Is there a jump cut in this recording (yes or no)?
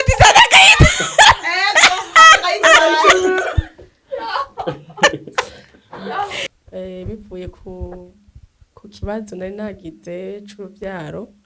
yes